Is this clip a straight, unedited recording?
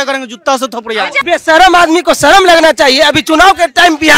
no; 1 cut; at 1.2 s

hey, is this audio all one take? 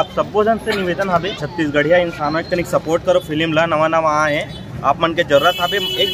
no; 1 cut; at 1.4 s

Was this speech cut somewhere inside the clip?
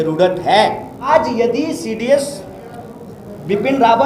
yes; 1 cut; at 1.1 s

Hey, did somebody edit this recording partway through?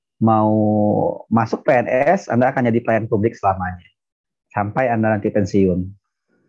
no; 0 cuts

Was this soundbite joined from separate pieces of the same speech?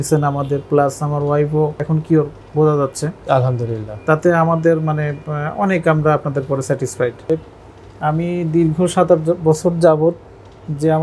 yes; 1 cut; at 7.3 s

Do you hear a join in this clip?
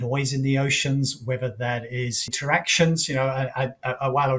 yes; 1 cut; at 2.3 s

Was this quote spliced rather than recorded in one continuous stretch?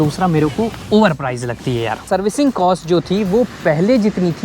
yes; 1 cut; at 2.0 s

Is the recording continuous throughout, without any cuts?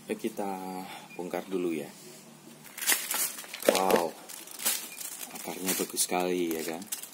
no; 1 cut; at 2.7 s

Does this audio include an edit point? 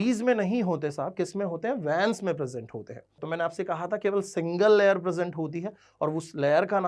yes; 1 cut; at 3.2 s

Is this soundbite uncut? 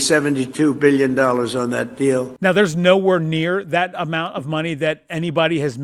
yes; 0 cuts

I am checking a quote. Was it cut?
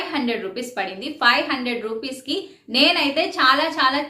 no; 0 cuts

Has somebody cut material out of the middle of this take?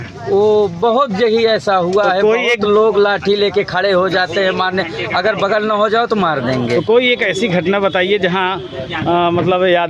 no; 0 cuts

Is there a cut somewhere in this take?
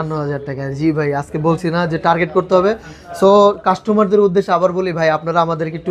no; 0 cuts

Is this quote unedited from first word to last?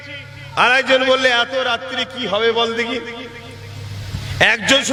yes; 0 cuts

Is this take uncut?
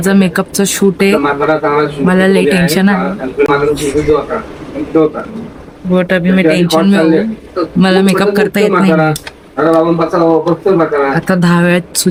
yes; 0 cuts

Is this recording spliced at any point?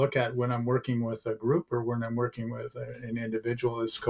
no; 0 cuts

